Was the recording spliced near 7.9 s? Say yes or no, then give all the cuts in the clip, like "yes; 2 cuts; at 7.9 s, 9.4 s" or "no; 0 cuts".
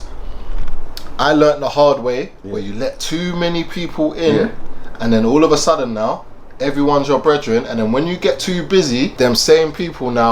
no; 1 cut; at 9.1 s